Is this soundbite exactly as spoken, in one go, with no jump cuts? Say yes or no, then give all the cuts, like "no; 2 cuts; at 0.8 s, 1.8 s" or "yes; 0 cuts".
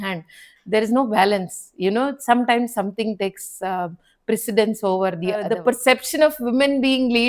no; 1 cut; at 5.5 s